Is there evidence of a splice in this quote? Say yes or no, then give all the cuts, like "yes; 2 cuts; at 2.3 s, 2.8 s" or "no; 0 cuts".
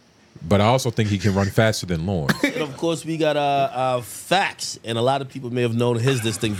yes; 1 cut; at 2.5 s